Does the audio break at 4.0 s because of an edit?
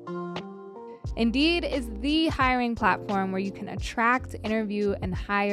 no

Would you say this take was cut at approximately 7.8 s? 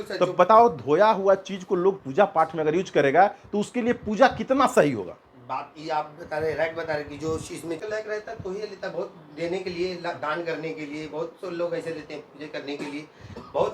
yes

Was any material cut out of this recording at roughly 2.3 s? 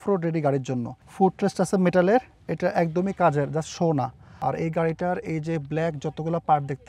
no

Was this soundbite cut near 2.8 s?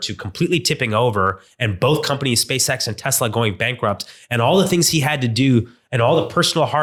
no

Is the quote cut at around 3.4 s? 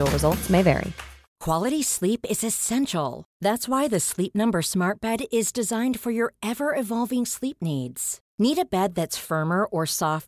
no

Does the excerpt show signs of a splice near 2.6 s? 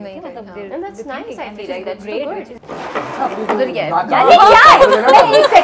yes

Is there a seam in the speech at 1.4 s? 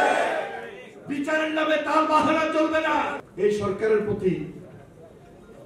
no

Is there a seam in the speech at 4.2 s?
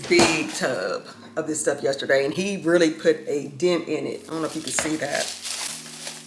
no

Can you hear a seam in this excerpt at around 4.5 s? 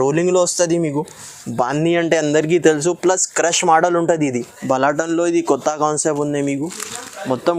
yes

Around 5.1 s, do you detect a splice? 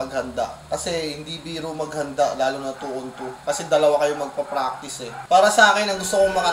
yes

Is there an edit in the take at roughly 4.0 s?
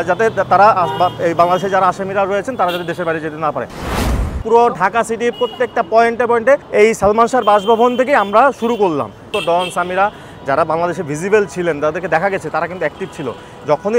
yes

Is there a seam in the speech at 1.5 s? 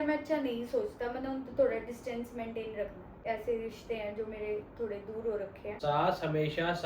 no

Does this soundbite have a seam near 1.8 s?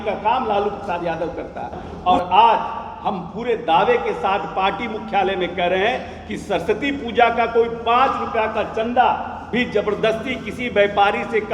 yes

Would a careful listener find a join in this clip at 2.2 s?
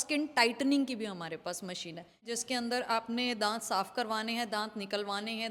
yes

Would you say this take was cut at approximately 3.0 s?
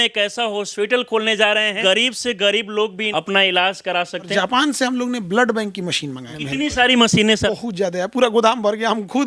yes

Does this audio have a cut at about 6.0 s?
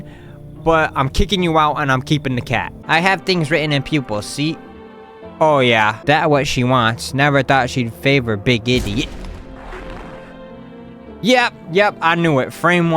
yes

